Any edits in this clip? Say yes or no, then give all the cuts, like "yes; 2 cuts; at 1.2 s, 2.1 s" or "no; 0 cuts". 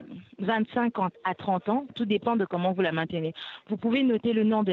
no; 0 cuts